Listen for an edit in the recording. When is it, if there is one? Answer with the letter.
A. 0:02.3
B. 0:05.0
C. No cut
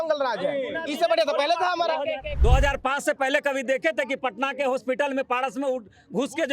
A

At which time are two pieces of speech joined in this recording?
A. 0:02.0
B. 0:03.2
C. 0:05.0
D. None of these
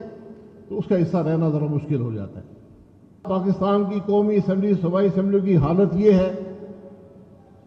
B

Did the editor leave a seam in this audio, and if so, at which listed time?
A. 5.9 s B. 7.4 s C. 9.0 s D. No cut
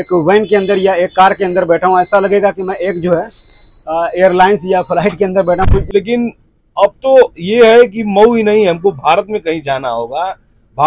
A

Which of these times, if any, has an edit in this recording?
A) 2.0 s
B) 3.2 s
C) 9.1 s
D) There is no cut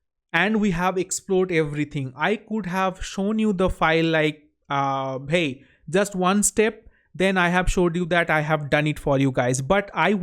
D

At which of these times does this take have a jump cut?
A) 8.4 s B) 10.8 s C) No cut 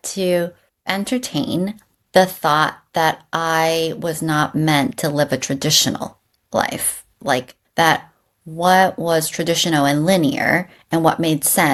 C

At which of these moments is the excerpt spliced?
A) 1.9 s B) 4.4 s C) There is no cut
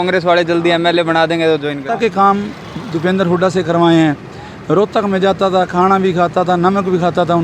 A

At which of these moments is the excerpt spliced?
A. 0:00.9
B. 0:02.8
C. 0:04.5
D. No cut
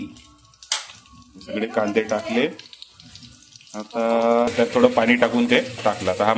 C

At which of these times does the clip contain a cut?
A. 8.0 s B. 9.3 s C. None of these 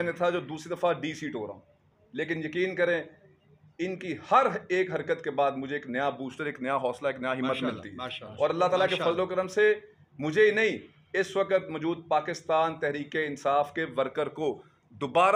C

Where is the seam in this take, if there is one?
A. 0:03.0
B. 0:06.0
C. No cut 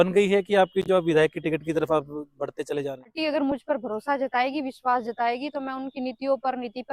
A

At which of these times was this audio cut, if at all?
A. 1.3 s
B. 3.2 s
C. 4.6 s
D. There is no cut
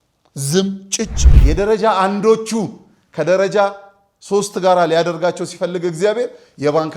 A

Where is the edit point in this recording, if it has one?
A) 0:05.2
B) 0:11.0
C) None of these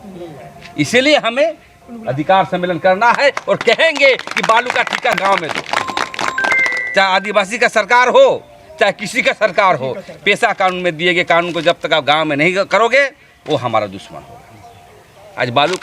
A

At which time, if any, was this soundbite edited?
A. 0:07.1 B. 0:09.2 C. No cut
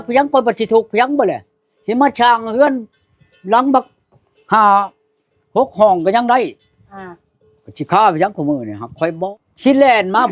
B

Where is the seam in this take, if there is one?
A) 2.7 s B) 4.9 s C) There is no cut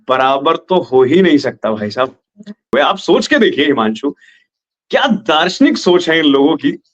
A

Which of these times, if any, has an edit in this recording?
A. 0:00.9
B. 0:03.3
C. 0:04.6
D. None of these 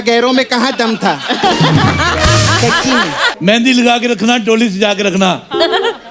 B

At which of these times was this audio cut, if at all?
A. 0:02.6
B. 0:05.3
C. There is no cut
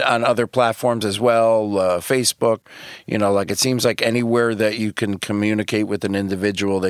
A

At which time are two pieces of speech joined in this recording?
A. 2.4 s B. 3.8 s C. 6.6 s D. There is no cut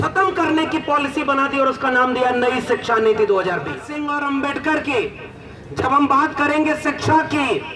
B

